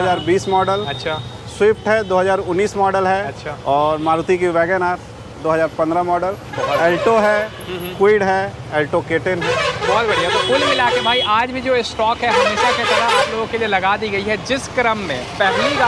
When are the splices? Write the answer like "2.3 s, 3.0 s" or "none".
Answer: none